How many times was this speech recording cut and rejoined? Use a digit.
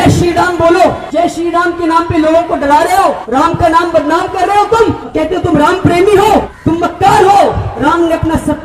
5